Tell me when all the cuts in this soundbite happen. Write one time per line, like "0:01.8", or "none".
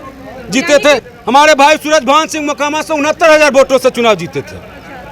0:01.1